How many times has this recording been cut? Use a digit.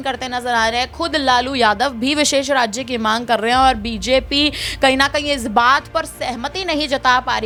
0